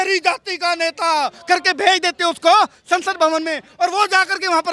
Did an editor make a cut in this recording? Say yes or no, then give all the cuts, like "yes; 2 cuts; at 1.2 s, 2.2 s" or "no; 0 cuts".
no; 0 cuts